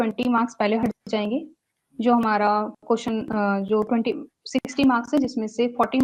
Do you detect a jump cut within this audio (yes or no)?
no